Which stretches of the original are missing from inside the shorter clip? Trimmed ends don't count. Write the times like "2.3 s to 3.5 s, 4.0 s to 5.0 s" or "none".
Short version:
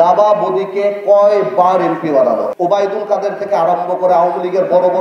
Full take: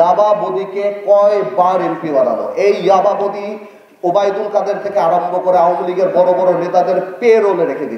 2.5 s to 3.9 s